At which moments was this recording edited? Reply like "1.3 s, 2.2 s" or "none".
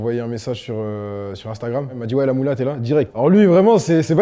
none